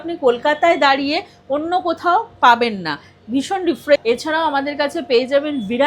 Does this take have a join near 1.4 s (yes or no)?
no